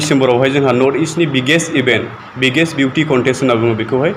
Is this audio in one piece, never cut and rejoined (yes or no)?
yes